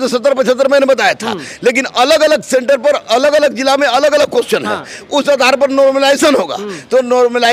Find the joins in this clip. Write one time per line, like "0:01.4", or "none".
none